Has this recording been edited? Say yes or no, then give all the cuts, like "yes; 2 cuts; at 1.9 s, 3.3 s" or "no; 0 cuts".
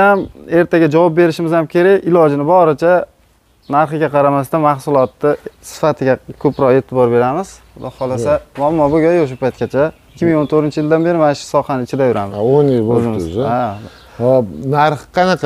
no; 0 cuts